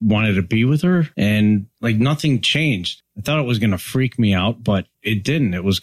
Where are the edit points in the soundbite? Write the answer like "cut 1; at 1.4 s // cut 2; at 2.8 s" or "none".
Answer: cut 1; at 1.1 s // cut 2; at 1.7 s // cut 3; at 2.9 s // cut 4; at 4.9 s